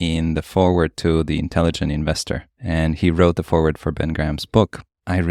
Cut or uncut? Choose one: uncut